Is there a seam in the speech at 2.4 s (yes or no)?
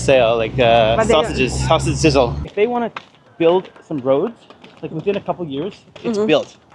yes